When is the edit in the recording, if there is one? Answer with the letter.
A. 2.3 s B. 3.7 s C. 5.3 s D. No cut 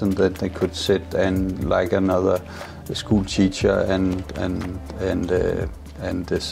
D